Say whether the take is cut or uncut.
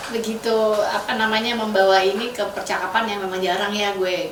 uncut